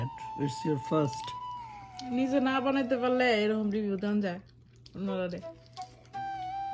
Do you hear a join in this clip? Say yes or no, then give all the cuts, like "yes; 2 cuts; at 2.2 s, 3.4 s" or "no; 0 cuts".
yes; 1 cut; at 5.7 s